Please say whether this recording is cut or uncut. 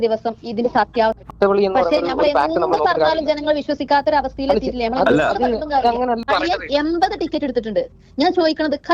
cut